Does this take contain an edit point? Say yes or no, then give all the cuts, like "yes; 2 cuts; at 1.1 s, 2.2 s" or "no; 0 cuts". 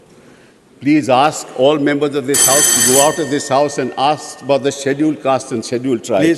no; 0 cuts